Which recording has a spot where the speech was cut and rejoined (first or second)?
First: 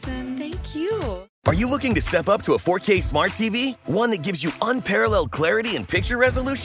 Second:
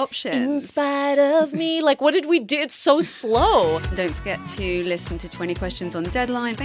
first